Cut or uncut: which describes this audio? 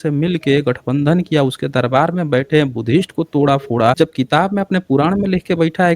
cut